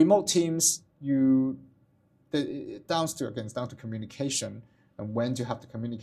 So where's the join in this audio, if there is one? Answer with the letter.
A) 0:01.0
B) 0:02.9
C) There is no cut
C